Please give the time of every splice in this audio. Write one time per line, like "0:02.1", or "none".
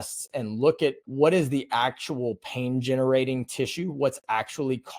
0:01.0